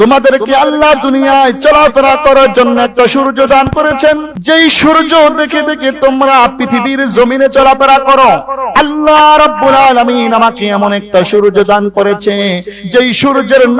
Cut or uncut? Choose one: cut